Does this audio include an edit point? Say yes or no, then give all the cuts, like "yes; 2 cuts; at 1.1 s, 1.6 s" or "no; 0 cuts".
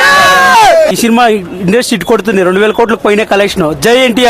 yes; 1 cut; at 1.0 s